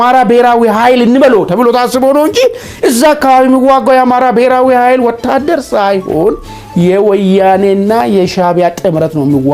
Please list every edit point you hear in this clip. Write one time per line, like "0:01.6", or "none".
none